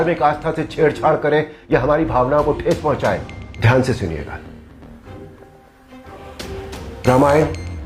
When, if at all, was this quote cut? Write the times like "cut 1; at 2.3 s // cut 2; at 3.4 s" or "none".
cut 1; at 3.4 s // cut 2; at 4.4 s // cut 3; at 6.6 s